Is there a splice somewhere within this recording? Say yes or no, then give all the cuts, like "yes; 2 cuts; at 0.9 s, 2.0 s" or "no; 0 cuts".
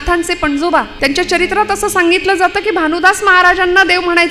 yes; 1 cut; at 0.9 s